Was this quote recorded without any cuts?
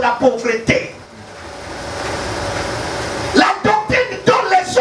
no; 1 cut; at 1.0 s

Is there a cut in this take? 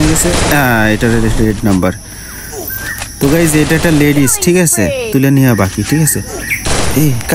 yes; 1 cut; at 5.1 s

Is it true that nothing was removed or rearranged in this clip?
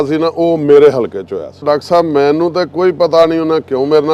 no; 1 cut; at 1.6 s

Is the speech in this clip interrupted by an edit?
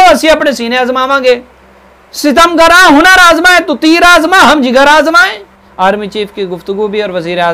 yes; 1 cut; at 5.6 s

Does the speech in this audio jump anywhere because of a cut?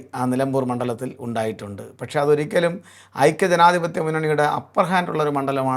no; 0 cuts

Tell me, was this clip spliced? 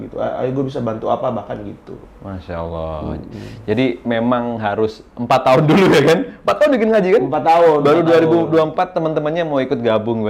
no; 0 cuts

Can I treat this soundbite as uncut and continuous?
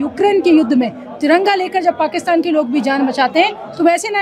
yes; 0 cuts

